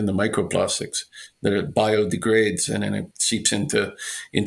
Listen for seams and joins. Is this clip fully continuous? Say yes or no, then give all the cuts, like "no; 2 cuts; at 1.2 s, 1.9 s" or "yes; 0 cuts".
yes; 0 cuts